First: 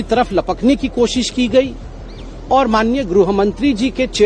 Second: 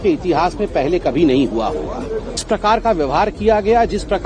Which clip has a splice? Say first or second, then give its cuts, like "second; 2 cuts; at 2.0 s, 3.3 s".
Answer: second; 1 cut; at 2.4 s